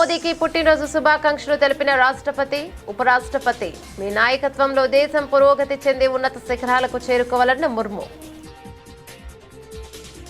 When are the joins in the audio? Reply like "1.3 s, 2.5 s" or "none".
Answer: 8.1 s